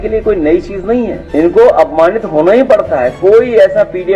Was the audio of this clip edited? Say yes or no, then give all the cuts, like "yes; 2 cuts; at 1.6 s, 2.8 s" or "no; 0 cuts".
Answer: yes; 1 cut; at 1.2 s